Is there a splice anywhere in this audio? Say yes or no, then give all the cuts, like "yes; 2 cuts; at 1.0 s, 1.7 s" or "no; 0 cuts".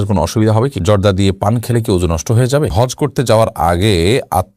yes; 2 cuts; at 0.8 s, 2.7 s